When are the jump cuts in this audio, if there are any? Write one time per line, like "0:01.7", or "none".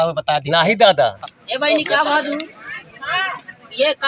0:01.1